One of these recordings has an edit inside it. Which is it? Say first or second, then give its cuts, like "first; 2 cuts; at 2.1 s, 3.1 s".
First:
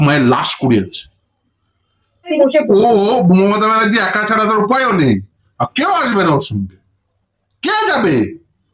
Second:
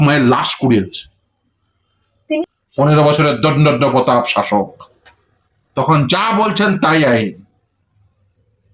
second; 1 cut; at 2.4 s